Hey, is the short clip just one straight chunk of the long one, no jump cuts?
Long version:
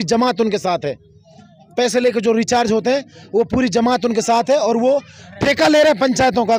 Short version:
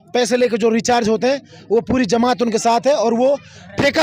yes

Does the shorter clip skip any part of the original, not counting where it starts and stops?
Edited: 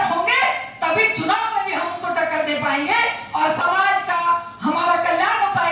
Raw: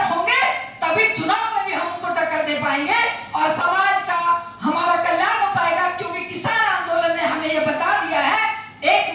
no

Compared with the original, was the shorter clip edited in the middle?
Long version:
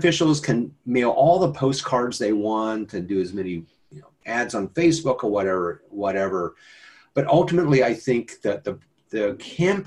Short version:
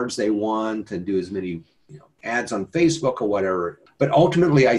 yes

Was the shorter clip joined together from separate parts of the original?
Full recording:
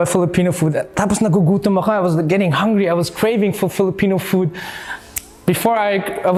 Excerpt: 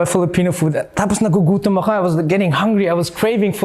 no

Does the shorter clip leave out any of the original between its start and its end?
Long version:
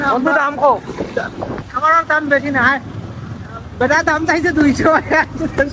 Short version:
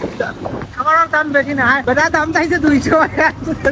yes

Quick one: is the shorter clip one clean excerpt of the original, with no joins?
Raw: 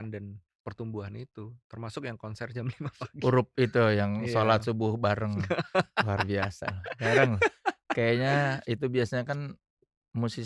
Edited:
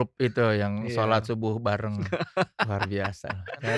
yes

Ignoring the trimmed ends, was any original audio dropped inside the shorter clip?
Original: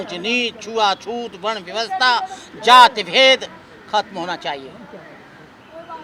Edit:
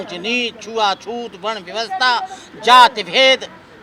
no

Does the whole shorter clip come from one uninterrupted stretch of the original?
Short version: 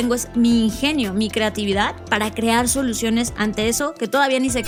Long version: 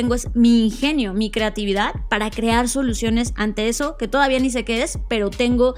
yes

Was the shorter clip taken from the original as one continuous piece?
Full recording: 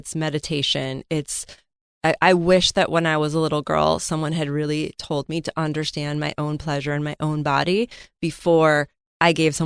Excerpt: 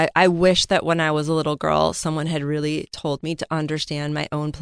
yes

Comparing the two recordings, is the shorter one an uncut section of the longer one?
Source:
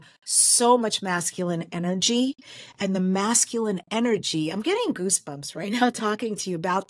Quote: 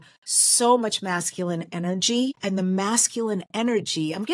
no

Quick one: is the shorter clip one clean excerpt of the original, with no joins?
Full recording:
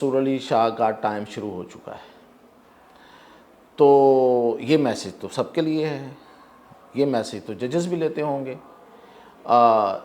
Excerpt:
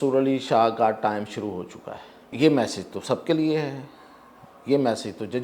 no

